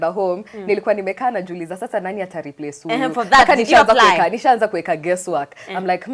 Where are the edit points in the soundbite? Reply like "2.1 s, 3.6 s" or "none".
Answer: none